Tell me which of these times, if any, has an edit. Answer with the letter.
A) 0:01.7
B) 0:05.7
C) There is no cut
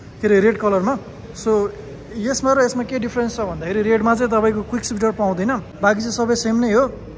C